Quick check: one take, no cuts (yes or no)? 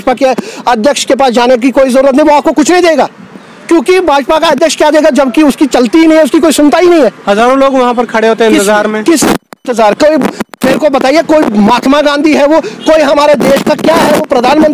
yes